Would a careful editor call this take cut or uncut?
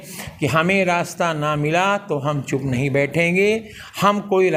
uncut